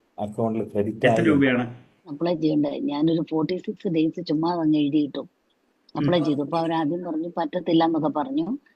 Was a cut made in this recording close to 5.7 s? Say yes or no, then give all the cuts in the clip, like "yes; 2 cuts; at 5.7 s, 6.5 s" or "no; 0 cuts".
no; 1 cut; at 2.2 s